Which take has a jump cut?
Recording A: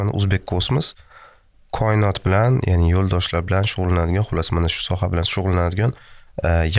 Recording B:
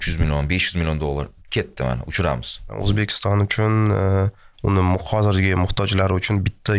B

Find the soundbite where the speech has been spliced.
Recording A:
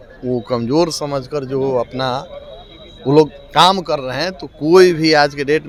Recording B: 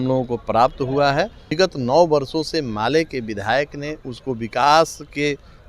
B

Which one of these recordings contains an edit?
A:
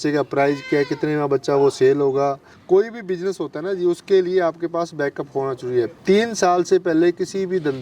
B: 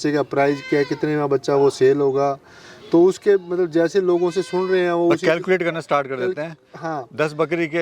A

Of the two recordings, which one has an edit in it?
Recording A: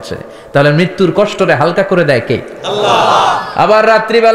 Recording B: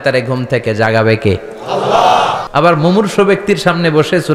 B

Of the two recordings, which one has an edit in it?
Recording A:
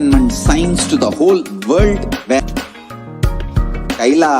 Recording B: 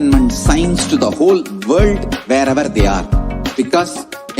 A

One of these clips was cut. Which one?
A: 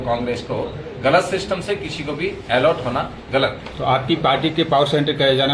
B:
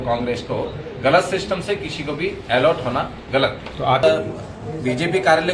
B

